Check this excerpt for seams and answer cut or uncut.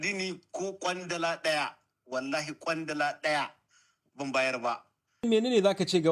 cut